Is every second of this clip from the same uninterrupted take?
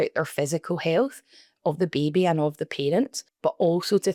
yes; 0 cuts

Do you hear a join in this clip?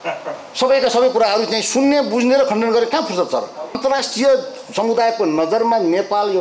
yes; 1 cut; at 3.8 s

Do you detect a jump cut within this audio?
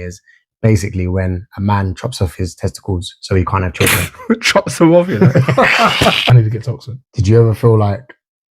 yes; 1 cut; at 6.3 s

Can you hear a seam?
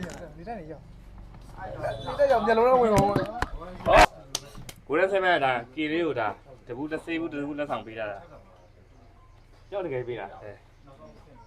yes; 1 cut; at 4.0 s

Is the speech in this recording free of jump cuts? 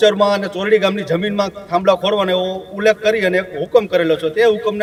yes; 0 cuts

